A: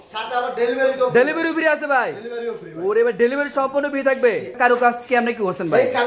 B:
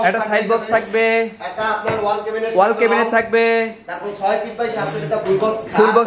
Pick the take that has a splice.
A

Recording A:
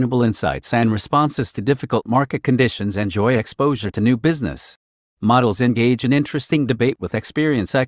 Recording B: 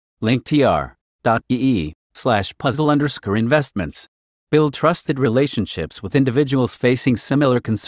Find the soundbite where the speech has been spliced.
B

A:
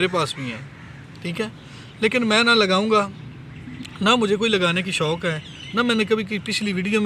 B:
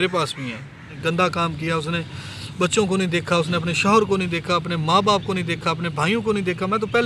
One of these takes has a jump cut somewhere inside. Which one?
B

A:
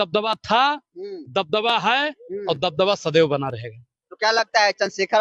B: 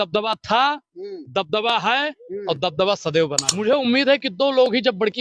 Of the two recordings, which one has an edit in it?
B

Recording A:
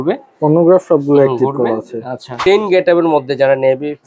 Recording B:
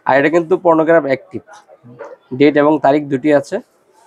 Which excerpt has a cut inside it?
A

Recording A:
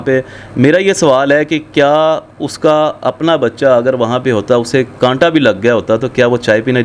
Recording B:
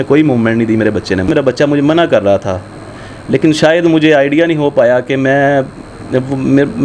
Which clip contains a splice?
B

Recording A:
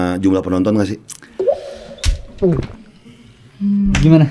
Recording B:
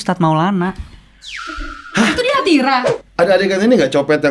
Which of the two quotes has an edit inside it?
B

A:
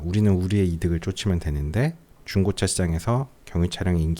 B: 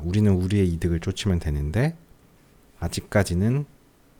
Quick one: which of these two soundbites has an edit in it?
A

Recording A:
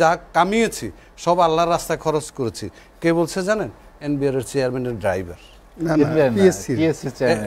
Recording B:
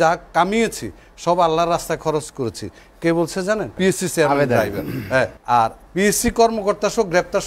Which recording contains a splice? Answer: B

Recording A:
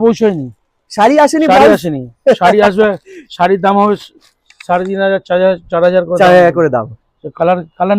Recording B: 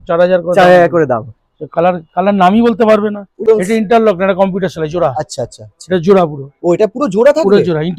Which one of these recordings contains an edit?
B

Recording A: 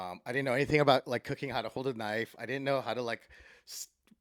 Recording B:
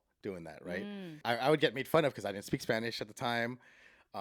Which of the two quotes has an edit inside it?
B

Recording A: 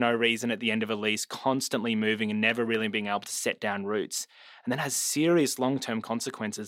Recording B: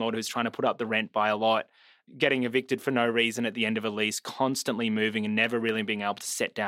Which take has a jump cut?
B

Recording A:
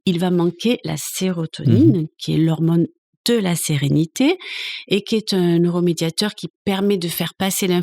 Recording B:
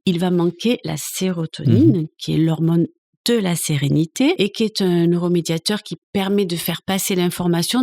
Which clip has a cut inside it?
B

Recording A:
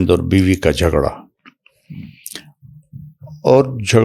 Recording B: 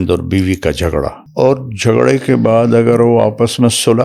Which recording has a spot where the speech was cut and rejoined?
B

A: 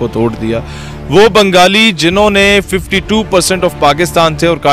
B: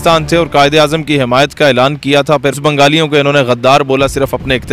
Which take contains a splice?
B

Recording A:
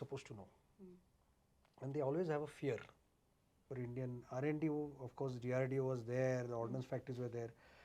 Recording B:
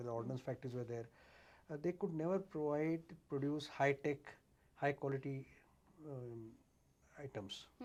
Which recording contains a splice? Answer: A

